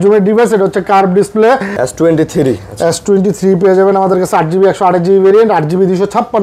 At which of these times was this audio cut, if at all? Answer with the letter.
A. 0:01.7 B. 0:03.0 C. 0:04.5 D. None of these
A